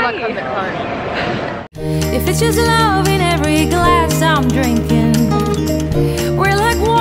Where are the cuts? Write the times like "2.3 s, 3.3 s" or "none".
none